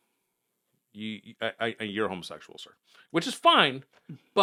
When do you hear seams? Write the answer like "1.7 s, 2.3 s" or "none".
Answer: none